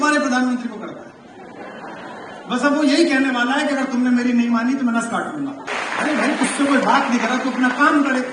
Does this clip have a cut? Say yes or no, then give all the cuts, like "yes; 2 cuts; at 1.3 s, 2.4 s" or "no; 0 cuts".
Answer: yes; 1 cut; at 5.7 s